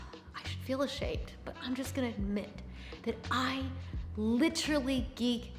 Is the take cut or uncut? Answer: uncut